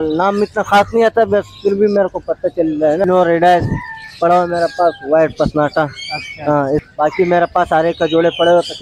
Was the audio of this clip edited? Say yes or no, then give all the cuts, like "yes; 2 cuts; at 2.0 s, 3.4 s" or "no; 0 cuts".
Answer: yes; 2 cuts; at 3.0 s, 6.8 s